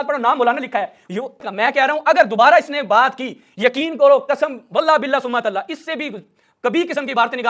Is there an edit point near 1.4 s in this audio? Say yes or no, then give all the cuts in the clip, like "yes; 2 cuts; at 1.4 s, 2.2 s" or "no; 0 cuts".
yes; 1 cut; at 1.4 s